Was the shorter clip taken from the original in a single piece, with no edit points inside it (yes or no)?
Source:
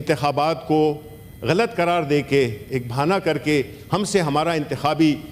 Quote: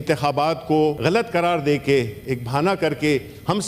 no